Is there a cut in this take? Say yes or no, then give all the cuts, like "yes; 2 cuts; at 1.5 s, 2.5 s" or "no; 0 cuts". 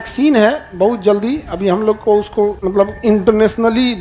yes; 1 cut; at 2.6 s